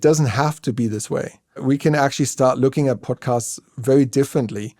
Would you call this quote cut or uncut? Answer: cut